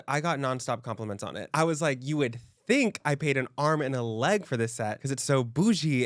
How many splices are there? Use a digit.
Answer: 1